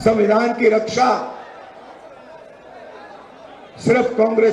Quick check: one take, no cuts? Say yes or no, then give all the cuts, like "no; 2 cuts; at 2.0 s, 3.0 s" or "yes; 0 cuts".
yes; 0 cuts